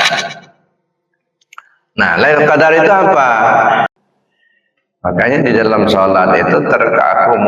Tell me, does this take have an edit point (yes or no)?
yes